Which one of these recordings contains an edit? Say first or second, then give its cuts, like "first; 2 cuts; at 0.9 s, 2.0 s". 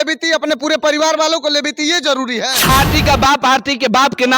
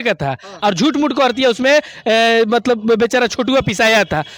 first; 1 cut; at 2.7 s